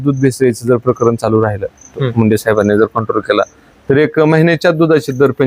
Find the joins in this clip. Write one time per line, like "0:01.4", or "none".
none